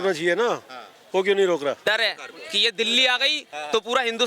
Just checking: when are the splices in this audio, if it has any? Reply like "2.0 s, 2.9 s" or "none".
1.8 s